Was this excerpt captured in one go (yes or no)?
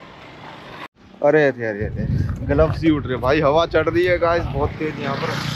no